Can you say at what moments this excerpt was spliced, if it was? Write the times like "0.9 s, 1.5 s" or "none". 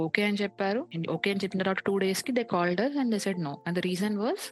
none

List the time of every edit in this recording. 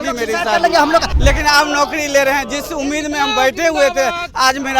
1.1 s

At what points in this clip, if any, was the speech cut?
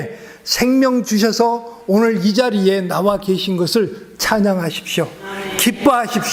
none

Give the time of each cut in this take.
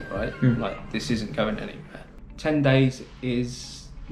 2.2 s

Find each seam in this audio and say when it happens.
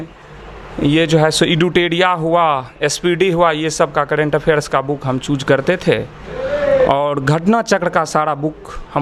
none

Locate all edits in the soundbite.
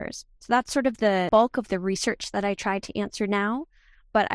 1.3 s

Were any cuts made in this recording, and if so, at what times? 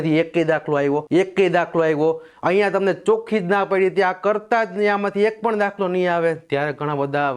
1.0 s

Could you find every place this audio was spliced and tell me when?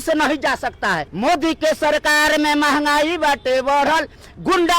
1.1 s

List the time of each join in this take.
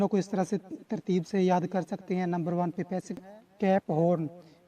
3.2 s

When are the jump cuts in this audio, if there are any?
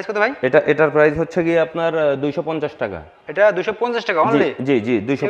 none

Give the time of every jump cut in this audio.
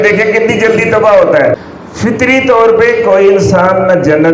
1.6 s

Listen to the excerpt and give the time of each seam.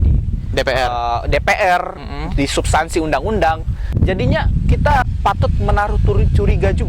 3.9 s, 5.0 s

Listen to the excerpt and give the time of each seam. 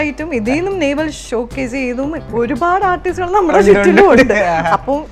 1.2 s, 2.3 s

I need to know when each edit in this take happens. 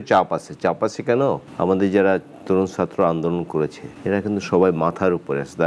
1.5 s, 3.9 s

